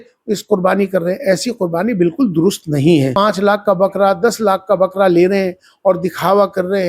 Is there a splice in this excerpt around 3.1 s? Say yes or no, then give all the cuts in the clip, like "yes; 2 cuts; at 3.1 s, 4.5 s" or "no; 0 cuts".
yes; 1 cut; at 3.1 s